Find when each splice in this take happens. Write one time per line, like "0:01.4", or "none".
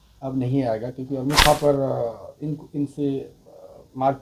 0:01.4